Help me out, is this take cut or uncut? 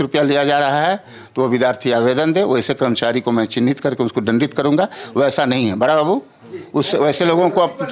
uncut